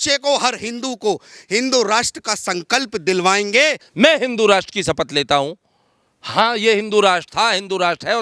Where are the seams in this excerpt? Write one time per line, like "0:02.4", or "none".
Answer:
0:03.8